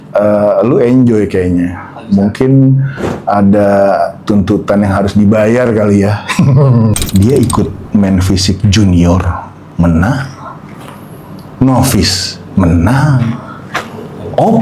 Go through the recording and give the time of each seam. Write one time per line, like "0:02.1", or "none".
0:06.9